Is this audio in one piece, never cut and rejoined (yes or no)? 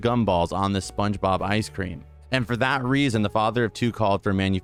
yes